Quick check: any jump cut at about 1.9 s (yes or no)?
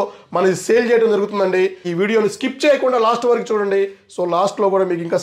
yes